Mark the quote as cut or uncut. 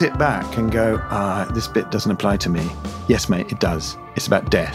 uncut